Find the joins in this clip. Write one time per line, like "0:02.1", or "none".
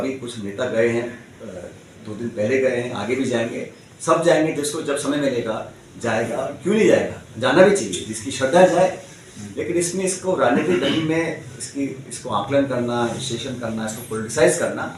none